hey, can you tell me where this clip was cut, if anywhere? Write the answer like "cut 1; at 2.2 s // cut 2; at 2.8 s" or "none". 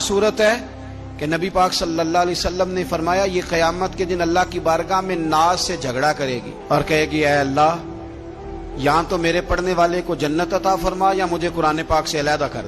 none